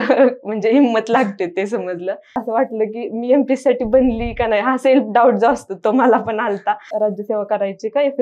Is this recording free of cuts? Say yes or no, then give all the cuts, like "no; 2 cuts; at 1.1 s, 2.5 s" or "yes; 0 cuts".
no; 2 cuts; at 2.4 s, 6.9 s